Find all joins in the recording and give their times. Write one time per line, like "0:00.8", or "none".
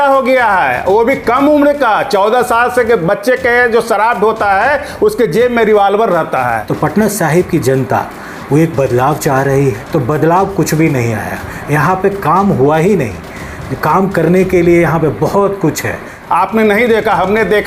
0:06.7
0:09.8
0:16.1

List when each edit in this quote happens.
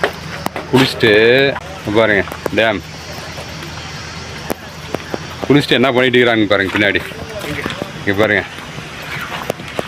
0:01.7

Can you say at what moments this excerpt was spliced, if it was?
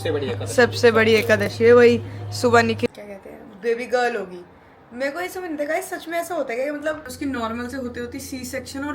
0:02.9
0:07.1

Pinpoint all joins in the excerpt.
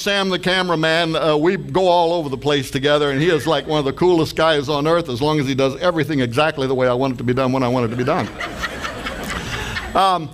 none

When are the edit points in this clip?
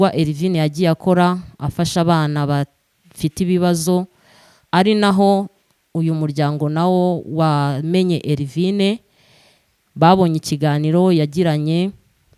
none

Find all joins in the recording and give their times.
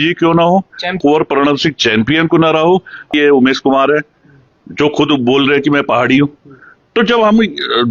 0:01.0
0:03.1

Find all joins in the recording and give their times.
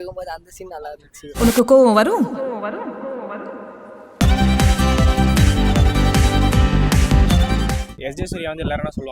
0:07.9

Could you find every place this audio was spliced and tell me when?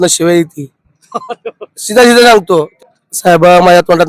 0:02.7

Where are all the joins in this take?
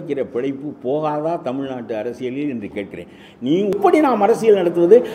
0:03.7

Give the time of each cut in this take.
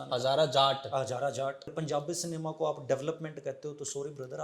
0:01.7

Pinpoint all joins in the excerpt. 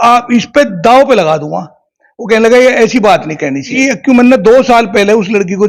0:03.7

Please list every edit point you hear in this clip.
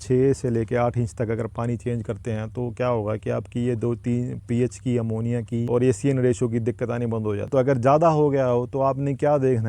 0:05.7
0:07.4

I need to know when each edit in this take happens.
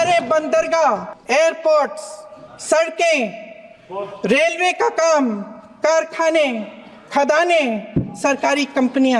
0:01.1

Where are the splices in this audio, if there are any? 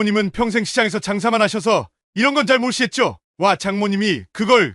0:03.2

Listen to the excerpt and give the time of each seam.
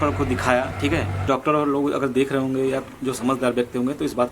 0:01.2

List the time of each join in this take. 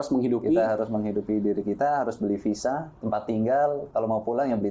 0:02.9
0:03.8

